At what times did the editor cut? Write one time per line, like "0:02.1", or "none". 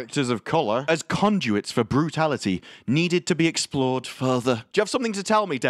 0:00.8
0:04.7